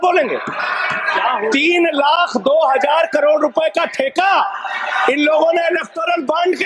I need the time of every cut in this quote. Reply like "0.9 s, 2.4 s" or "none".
none